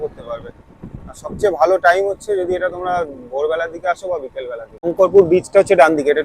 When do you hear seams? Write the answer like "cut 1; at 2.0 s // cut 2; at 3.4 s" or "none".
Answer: cut 1; at 4.9 s